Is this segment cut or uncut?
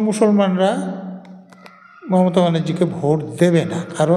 uncut